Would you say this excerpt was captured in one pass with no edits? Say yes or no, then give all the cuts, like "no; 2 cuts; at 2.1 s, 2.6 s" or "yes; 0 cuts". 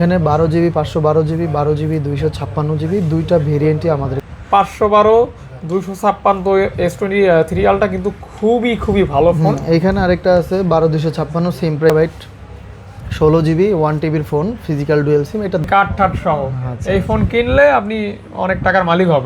no; 3 cuts; at 4.2 s, 11.9 s, 15.6 s